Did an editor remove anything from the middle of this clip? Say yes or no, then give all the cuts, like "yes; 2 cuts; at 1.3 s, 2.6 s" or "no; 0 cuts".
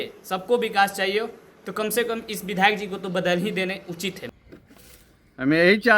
yes; 1 cut; at 4.2 s